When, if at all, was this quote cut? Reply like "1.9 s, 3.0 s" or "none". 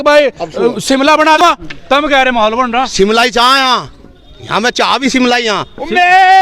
1.4 s